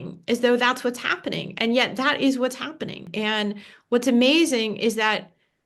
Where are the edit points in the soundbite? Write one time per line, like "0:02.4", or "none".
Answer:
0:03.1